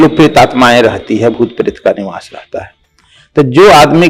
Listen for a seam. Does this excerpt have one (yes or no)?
no